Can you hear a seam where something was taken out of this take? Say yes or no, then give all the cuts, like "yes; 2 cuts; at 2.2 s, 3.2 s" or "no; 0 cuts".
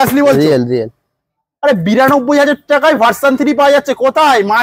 no; 0 cuts